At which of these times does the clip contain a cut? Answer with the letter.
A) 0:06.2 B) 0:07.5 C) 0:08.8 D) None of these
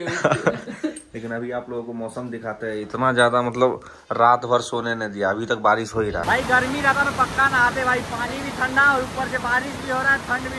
A